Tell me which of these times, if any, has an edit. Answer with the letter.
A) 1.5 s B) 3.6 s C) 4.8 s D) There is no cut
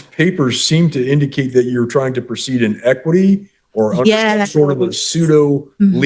D